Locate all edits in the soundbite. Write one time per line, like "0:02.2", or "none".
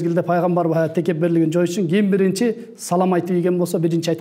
none